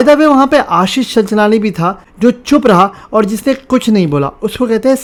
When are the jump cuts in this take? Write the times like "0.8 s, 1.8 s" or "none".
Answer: none

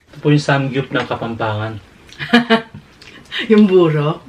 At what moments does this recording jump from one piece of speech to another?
none

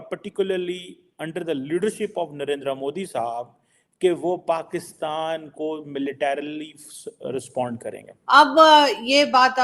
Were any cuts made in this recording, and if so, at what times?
8.1 s

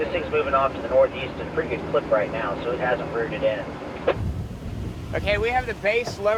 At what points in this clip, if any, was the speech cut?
none

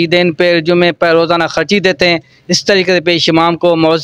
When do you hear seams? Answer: none

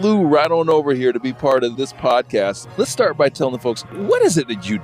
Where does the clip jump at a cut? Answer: 2.6 s, 3.9 s

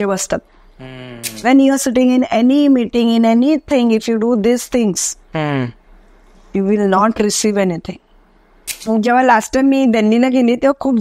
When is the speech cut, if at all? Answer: 1.2 s, 8.9 s

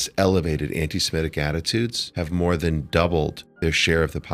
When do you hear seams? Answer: 2.0 s, 3.4 s

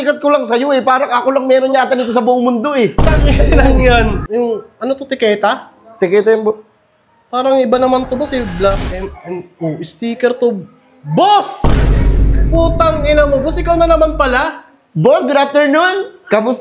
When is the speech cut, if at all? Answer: 4.2 s

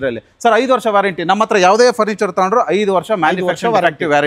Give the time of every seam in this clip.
none

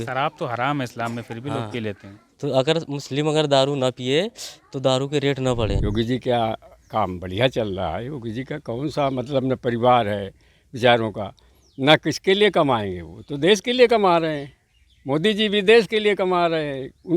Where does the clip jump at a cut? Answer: 5.8 s

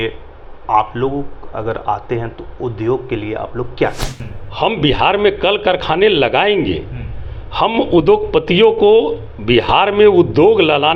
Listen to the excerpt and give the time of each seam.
none

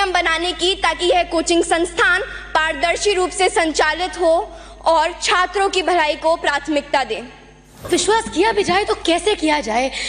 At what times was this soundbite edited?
7.9 s

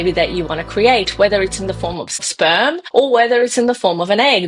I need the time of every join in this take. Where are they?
2.3 s

